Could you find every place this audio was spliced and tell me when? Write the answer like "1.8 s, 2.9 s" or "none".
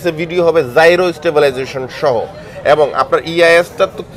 none